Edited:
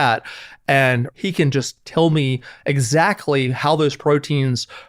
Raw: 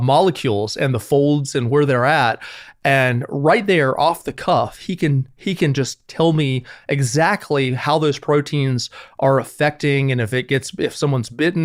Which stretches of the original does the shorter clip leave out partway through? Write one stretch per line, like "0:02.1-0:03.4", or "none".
0:03.3-0:05.3